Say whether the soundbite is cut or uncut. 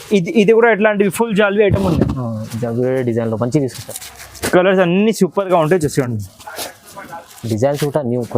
cut